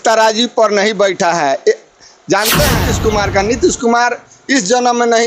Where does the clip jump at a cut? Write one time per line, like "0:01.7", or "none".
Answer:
0:02.9